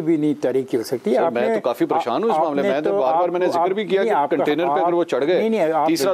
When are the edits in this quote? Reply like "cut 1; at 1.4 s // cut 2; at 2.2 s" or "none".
none

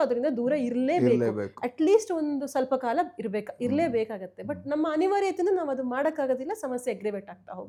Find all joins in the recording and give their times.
none

